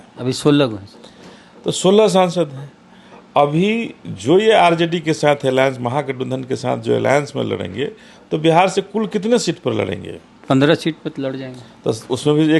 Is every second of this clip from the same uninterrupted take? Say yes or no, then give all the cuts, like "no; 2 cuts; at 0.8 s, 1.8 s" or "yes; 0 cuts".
yes; 0 cuts